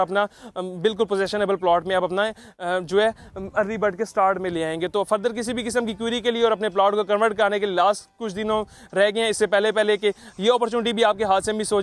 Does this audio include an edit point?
no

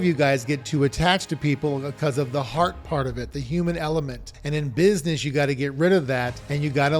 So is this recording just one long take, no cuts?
yes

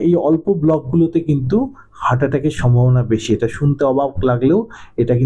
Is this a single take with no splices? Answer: yes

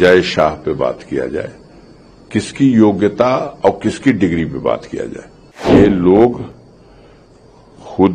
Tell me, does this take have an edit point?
yes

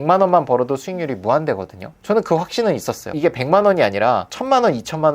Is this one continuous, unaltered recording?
no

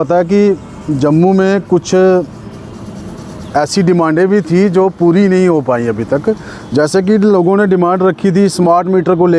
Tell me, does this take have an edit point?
no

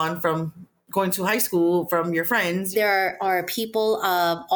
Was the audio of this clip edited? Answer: yes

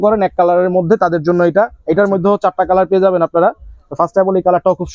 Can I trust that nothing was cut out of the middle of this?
yes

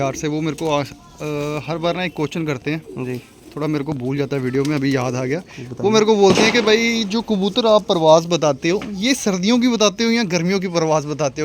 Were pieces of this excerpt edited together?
no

